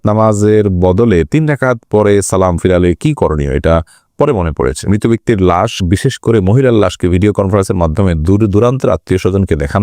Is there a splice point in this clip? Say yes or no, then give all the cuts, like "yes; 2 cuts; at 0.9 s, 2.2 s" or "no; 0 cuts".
yes; 1 cut; at 4.9 s